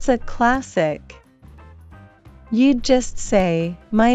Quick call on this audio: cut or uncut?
cut